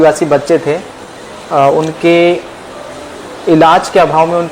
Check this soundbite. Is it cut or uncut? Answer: uncut